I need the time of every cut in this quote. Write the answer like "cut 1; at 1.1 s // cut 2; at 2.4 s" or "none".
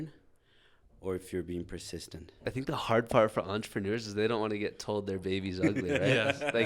cut 1; at 2.3 s